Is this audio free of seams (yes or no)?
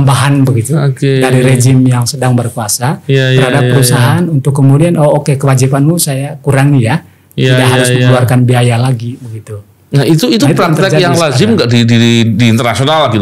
yes